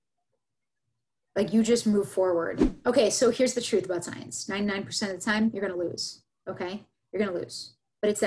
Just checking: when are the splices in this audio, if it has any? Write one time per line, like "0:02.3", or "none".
0:02.6

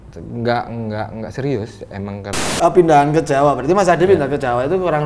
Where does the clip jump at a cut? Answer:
0:02.4

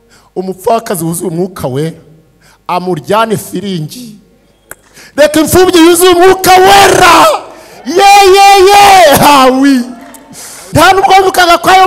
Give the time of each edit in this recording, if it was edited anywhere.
0:10.6

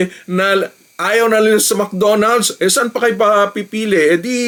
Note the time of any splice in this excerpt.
none

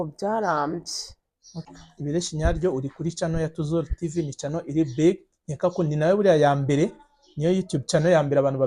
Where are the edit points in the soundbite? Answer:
0:01.6

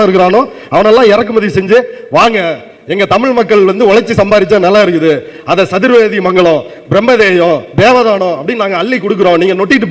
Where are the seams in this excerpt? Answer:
none

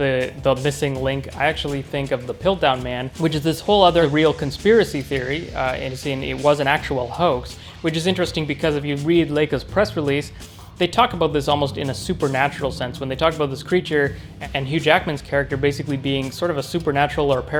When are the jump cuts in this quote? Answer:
0:04.1

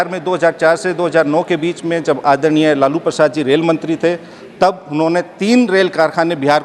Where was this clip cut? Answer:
none

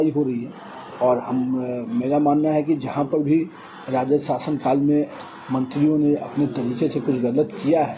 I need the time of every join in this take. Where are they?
none

